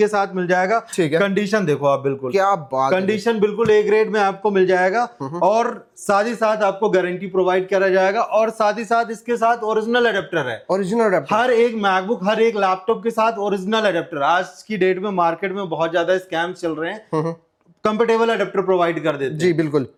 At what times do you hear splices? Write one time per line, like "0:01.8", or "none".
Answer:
none